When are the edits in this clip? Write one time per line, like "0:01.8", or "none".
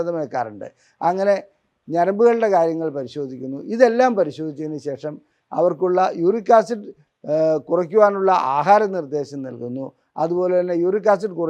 none